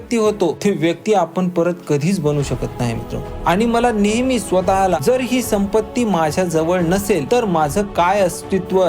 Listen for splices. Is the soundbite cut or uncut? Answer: cut